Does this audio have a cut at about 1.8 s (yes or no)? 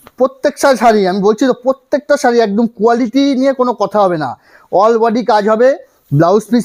no